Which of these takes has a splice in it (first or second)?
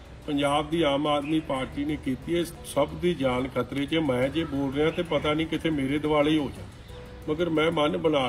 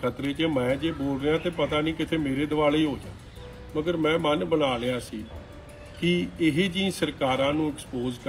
first